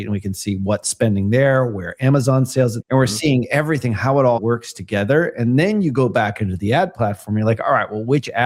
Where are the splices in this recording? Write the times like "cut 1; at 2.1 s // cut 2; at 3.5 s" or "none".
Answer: cut 1; at 2.8 s // cut 2; at 4.4 s